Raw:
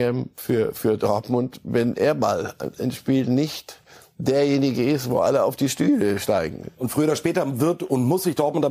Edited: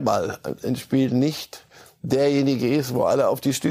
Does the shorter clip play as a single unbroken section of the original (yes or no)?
yes